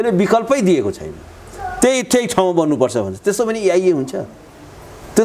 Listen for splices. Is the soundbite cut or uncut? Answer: uncut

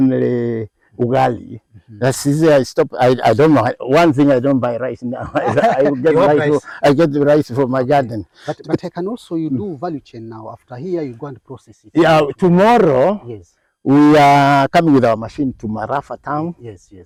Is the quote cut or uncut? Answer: uncut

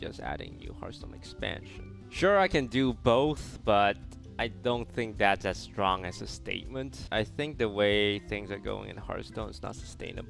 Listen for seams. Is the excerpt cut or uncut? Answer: cut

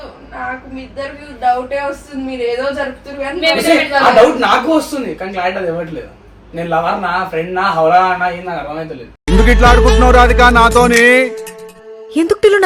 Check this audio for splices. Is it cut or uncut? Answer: uncut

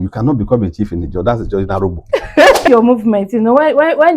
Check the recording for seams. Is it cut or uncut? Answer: cut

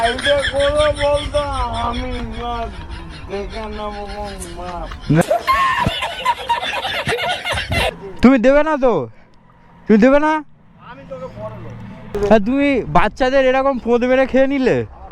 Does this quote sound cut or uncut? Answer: cut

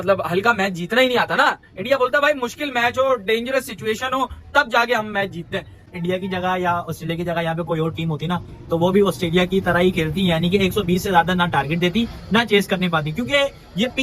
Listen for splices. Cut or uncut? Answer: cut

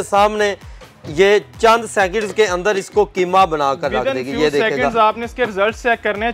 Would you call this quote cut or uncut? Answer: uncut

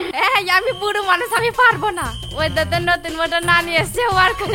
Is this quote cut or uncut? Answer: uncut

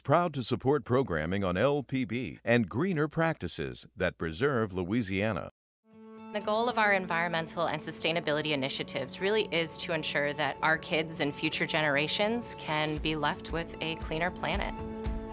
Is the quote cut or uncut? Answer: uncut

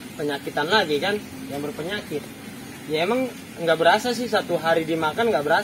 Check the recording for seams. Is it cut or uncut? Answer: uncut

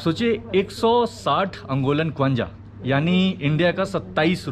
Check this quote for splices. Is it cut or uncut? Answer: uncut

